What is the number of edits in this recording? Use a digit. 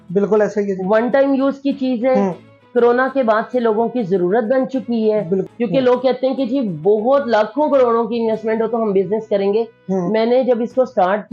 1